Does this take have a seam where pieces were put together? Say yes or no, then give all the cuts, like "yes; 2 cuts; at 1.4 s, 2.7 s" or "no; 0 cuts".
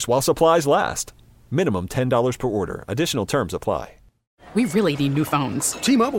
yes; 1 cut; at 4.4 s